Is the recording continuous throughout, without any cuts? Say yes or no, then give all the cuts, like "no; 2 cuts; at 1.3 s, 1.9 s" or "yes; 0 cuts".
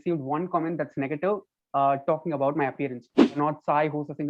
no; 1 cut; at 3.3 s